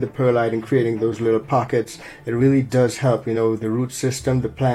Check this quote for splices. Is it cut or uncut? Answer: uncut